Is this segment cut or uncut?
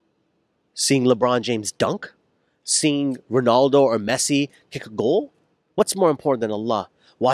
uncut